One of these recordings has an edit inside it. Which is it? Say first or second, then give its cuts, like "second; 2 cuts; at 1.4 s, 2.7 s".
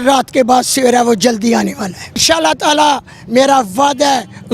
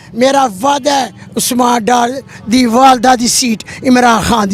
first; 1 cut; at 2.2 s